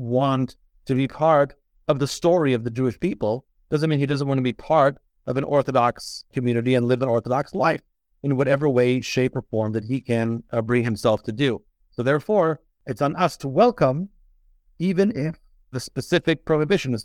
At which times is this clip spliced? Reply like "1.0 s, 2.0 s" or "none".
15.8 s